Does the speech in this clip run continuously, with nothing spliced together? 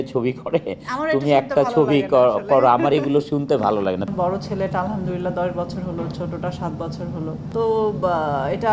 no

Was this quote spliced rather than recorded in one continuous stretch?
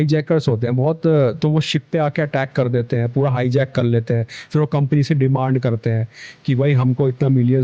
no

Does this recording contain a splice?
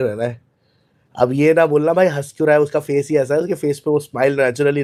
no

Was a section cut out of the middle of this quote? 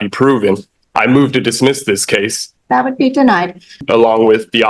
yes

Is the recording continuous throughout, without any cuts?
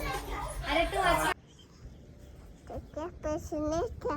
no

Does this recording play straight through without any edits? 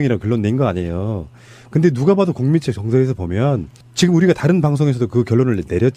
no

